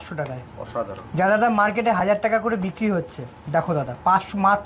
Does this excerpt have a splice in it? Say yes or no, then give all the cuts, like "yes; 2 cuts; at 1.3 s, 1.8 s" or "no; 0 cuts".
no; 0 cuts